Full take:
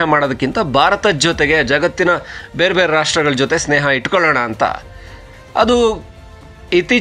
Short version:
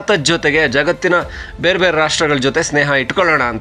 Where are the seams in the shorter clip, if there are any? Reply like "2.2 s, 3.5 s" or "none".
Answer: none